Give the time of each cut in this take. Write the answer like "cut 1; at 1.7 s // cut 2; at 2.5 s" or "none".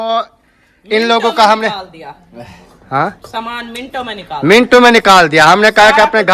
none